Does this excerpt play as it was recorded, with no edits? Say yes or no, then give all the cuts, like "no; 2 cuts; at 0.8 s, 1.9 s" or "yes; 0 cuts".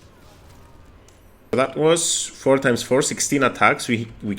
no; 1 cut; at 1.5 s